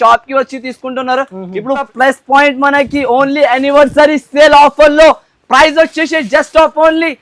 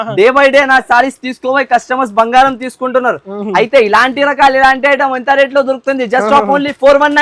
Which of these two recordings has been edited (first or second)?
first